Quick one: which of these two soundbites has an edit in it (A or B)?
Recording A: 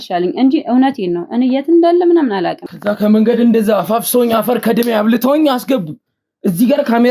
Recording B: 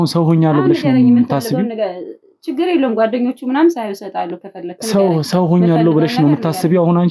A